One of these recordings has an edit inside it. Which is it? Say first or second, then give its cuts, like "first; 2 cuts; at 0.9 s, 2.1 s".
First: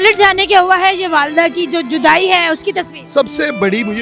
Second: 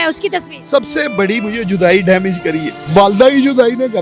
second; 1 cut; at 2.7 s